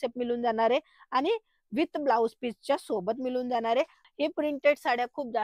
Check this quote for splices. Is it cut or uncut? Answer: cut